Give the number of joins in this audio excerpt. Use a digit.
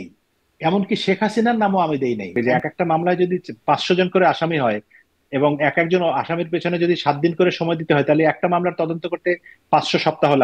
1